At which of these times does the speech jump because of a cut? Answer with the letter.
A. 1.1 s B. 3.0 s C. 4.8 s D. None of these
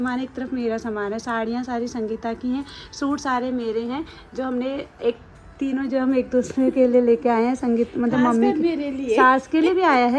D